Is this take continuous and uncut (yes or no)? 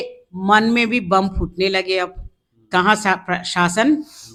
yes